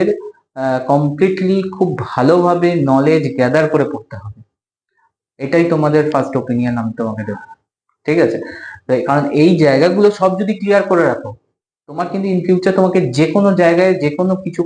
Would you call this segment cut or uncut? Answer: uncut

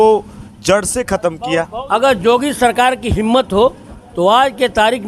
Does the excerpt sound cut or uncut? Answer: cut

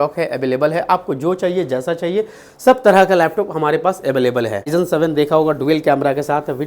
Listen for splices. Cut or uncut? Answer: cut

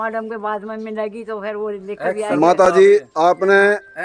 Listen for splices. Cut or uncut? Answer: uncut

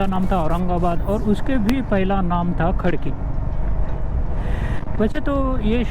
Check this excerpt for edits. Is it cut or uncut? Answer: uncut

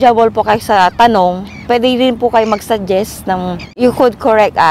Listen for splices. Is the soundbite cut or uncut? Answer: cut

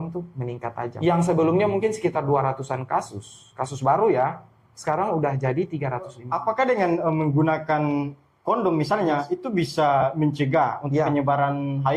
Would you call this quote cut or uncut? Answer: cut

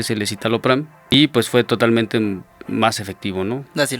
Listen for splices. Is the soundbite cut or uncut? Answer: cut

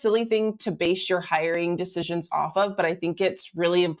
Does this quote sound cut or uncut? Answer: uncut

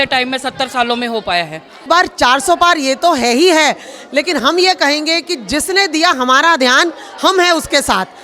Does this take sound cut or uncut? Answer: cut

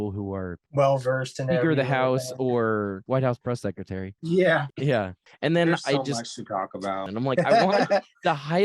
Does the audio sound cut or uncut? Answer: cut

